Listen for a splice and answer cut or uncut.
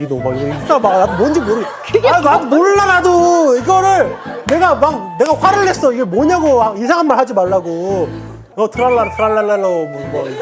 cut